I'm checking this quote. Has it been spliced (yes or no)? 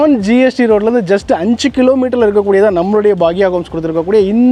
no